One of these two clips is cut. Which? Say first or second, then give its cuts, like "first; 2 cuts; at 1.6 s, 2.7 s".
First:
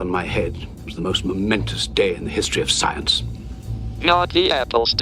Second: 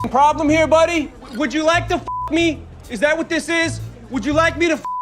second; 2 cuts; at 1.2 s, 3.9 s